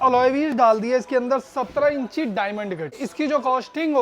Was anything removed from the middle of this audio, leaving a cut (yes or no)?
yes